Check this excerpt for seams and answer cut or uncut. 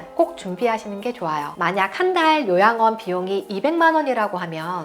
cut